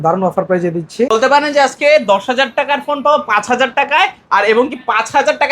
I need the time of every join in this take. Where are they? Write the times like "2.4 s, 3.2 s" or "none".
1.1 s